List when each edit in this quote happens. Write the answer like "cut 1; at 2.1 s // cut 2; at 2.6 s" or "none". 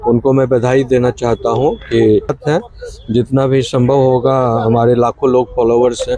cut 1; at 2.4 s